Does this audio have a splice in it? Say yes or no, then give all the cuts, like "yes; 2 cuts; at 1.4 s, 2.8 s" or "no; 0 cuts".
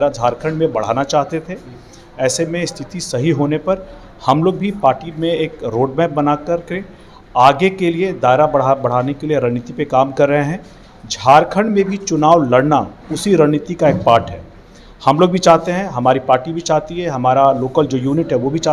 no; 0 cuts